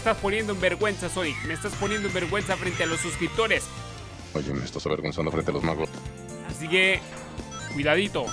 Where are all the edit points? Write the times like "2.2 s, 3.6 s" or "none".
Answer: 6.0 s